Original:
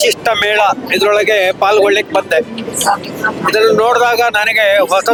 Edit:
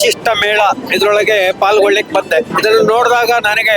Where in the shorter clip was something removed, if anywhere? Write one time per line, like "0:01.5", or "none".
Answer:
0:02.5